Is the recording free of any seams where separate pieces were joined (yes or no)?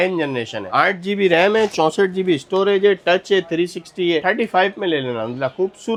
yes